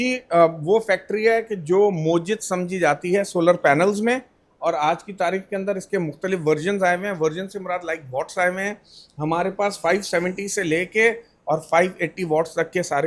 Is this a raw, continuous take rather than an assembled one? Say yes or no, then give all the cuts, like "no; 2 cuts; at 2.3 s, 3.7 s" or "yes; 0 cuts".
yes; 0 cuts